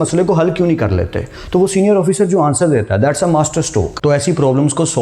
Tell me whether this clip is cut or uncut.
cut